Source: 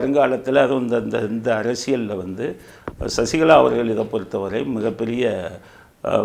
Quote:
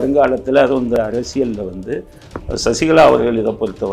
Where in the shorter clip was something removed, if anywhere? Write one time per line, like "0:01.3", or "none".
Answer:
0:01.0

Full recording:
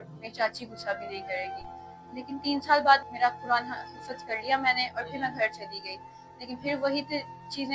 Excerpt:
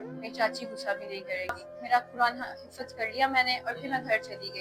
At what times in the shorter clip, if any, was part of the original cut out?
0:01.8

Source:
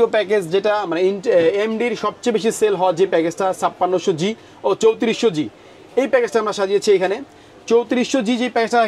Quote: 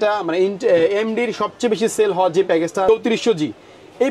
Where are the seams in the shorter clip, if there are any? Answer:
0:02.9

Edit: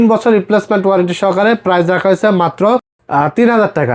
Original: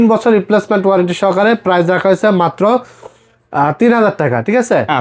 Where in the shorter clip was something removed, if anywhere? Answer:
0:03.0

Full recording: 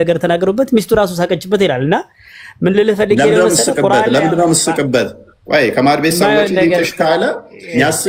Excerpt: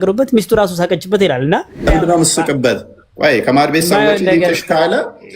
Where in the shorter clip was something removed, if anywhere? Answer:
0:01.9

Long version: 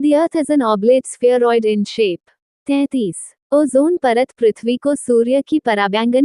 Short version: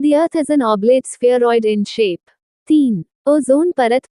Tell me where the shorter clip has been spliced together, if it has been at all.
0:02.7

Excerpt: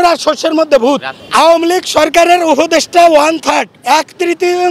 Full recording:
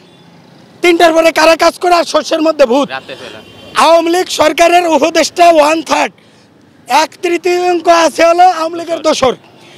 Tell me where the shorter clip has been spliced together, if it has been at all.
0:01.1
0:03.7

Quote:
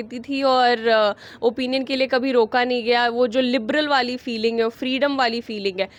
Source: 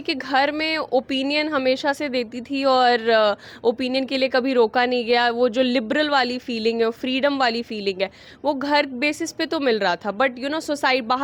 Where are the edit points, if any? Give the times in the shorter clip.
none

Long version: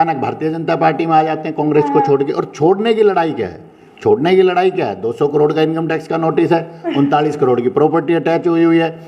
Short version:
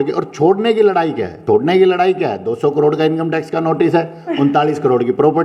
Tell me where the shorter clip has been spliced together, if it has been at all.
0:01.3

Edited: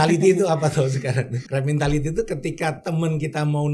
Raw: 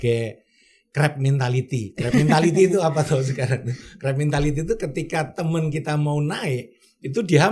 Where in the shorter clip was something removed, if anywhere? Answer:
0:01.4

